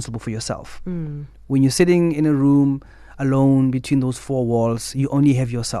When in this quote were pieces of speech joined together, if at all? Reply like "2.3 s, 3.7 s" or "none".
none